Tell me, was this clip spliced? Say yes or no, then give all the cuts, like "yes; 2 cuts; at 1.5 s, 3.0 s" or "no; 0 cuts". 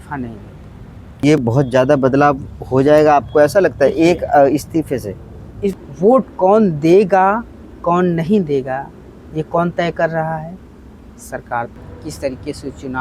yes; 3 cuts; at 1.2 s, 5.7 s, 11.8 s